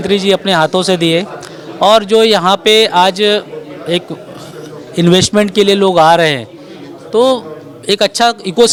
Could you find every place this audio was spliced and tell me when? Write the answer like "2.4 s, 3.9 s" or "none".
none